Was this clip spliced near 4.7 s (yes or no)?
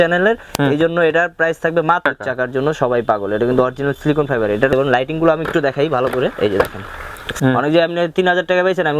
yes